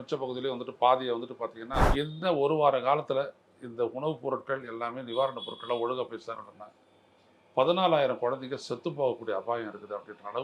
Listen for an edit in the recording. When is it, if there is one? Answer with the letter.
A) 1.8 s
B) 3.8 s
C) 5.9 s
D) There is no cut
A